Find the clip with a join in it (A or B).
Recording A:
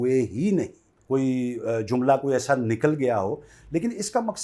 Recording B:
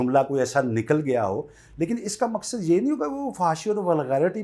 A